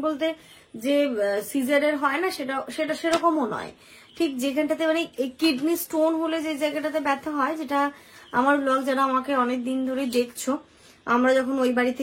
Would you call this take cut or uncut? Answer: uncut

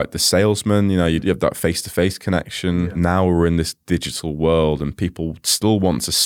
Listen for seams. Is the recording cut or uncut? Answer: cut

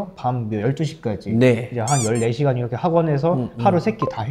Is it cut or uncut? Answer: uncut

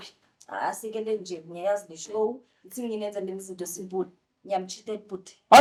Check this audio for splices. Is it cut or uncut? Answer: uncut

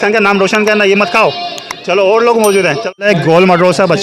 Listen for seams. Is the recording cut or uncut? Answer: uncut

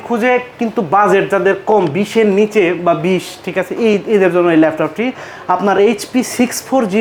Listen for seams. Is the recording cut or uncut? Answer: uncut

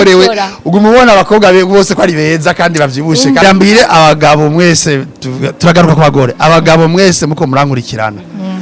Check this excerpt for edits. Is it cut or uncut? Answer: cut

